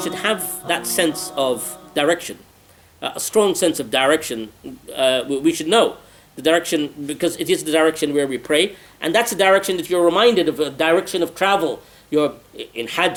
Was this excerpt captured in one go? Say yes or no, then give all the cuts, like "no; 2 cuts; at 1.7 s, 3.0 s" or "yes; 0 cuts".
yes; 0 cuts